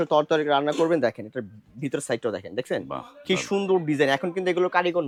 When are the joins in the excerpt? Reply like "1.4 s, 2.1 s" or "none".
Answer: none